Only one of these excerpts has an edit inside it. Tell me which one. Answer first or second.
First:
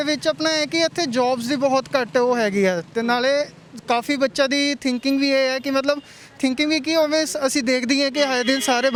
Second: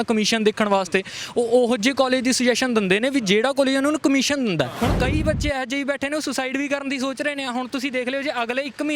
second